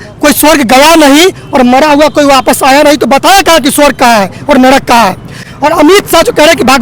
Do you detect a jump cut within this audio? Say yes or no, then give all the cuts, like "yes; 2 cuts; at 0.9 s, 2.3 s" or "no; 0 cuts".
no; 0 cuts